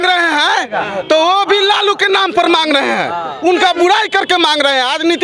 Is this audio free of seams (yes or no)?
yes